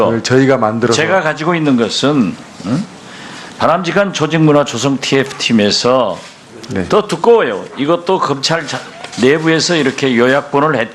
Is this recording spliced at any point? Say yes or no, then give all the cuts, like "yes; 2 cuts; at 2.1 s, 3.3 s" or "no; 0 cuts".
yes; 1 cut; at 3.3 s